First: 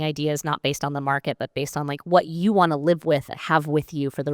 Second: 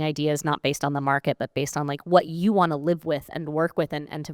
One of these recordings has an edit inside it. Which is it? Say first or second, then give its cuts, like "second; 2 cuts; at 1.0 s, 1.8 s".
first; 1 cut; at 3.4 s